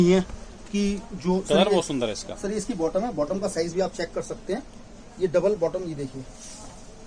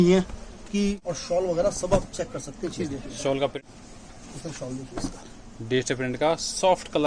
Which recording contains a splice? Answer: second; 2 cuts; at 1.1 s, 3.6 s

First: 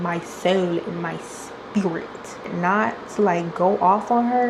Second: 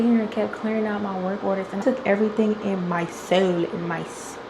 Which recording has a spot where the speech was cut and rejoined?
second; 1 cut; at 1.8 s

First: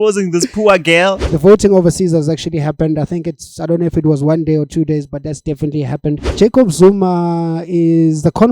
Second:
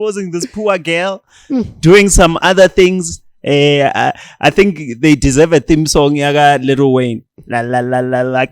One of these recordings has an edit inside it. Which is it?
first; 2 cuts; at 1.3 s, 6.3 s

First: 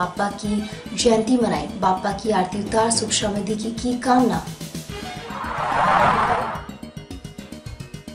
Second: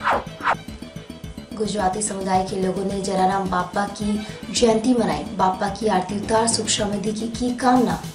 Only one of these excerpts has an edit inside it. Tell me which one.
second; 1 cut; at 1.3 s

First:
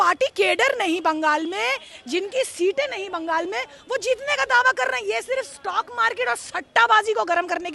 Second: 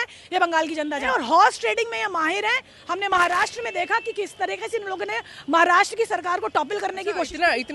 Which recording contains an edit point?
second; 1 cut; at 1.0 s

